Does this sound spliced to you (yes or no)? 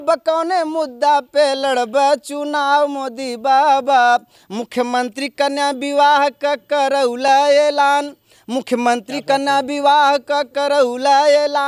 no